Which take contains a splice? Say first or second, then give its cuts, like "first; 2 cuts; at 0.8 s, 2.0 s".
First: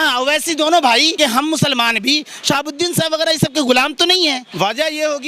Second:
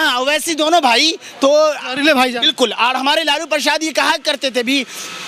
first; 2 cuts; at 1.2 s, 4.4 s